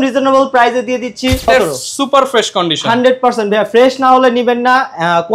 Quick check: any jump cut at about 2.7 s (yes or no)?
no